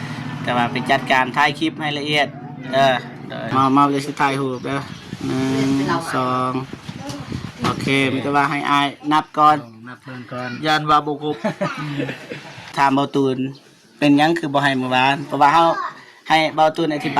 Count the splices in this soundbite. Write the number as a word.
two